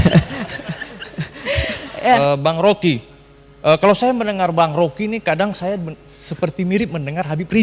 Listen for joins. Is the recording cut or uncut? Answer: cut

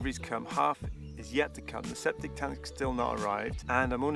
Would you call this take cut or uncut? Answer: uncut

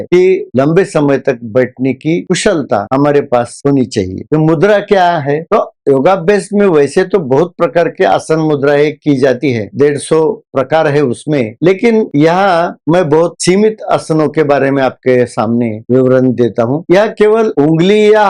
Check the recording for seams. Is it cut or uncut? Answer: uncut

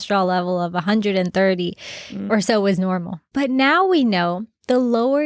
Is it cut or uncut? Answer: cut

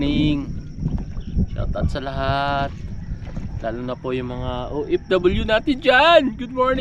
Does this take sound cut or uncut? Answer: uncut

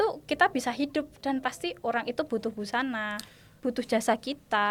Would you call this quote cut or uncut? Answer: uncut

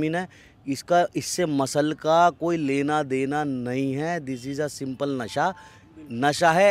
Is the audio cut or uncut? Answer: uncut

